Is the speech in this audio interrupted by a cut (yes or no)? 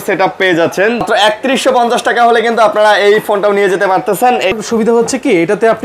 yes